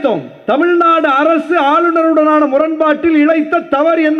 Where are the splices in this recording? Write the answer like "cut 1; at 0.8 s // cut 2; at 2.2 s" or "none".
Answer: none